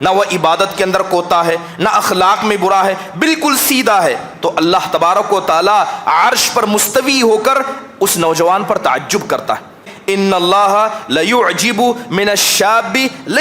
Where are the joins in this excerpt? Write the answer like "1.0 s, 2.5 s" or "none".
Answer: 9.9 s